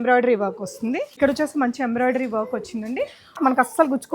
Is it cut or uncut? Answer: cut